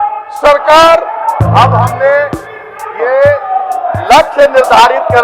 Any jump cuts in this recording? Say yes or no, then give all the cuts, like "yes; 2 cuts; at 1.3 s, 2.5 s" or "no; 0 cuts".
yes; 1 cut; at 1.4 s